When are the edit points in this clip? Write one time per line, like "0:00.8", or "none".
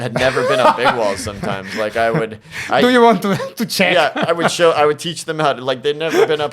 none